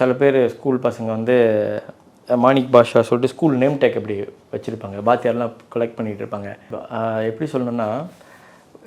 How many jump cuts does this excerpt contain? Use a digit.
1